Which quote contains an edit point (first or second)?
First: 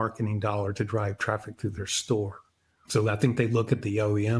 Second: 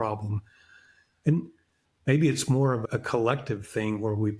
second